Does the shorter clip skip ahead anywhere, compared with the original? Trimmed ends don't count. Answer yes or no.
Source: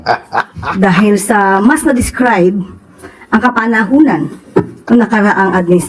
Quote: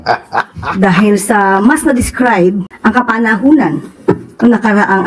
yes